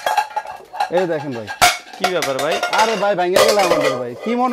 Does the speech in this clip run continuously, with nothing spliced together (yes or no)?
yes